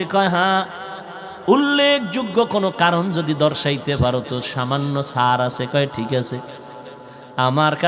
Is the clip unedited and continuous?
yes; 0 cuts

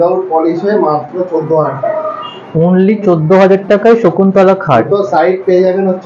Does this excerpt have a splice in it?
no; 0 cuts

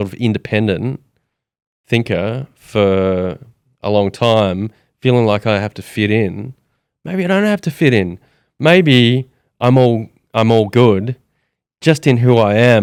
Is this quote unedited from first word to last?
yes; 0 cuts

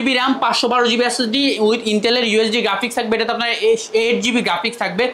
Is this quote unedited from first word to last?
yes; 0 cuts

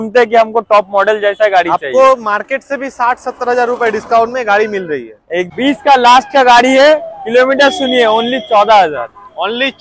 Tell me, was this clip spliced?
yes; 1 cut; at 5.5 s

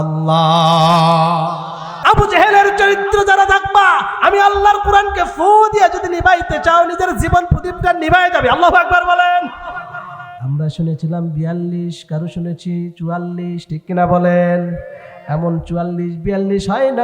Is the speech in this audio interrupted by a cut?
yes; 1 cut; at 1.9 s

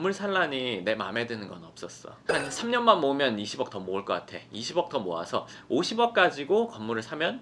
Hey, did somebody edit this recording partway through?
no; 0 cuts

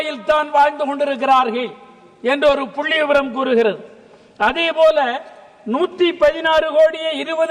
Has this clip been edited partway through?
no; 0 cuts

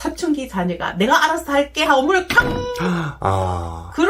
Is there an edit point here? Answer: no; 0 cuts

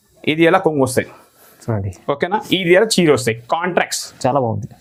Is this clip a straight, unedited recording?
yes; 0 cuts

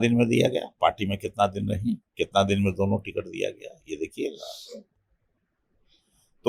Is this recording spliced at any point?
no; 0 cuts

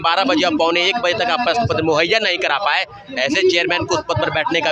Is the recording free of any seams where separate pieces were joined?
yes; 0 cuts

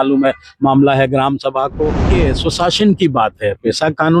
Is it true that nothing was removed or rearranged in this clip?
no; 1 cut; at 2.1 s

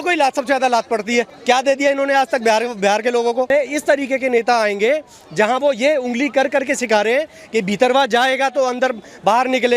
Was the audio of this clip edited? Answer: yes; 2 cuts; at 1.3 s, 3.5 s

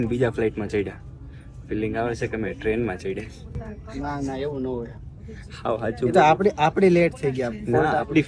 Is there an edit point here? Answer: no; 0 cuts

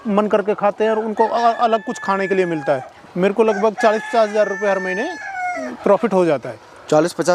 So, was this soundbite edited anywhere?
yes; 1 cut; at 2.9 s

